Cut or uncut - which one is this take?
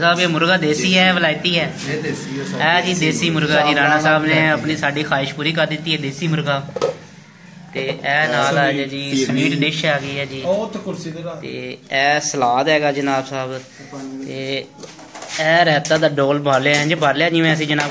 uncut